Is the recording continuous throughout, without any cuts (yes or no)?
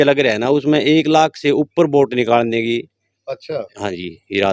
yes